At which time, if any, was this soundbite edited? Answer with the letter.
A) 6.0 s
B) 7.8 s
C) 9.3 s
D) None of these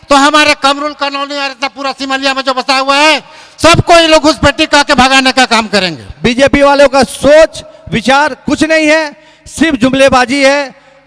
A